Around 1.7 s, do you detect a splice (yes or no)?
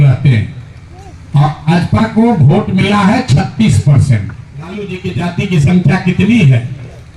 no